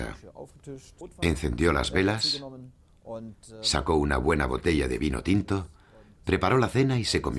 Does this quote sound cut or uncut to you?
cut